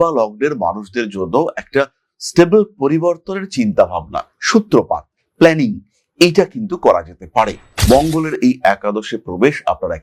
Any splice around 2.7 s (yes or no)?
no